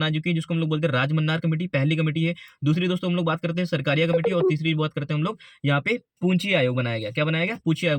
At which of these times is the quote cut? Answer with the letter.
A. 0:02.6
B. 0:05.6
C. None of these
C